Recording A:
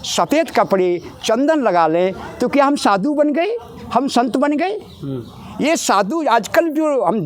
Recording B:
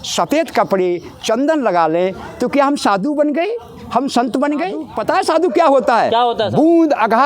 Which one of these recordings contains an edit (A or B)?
B